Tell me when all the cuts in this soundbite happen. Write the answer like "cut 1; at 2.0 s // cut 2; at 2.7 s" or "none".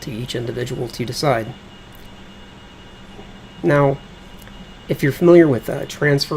cut 1; at 2.6 s